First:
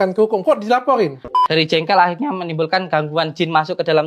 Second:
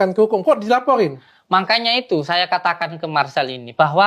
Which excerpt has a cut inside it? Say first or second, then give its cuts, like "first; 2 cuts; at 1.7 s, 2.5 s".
first; 1 cut; at 1.4 s